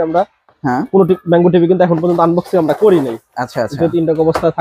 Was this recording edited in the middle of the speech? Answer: no; 0 cuts

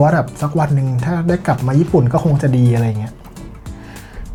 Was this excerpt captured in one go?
yes; 0 cuts

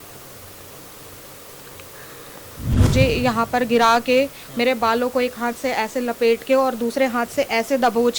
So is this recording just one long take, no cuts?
no; 1 cut; at 2.8 s

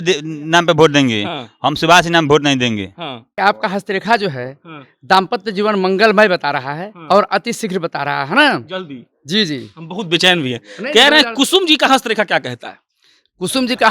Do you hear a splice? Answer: yes; 1 cut; at 3.3 s

